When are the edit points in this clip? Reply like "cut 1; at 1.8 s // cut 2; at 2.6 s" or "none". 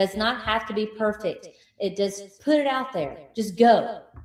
none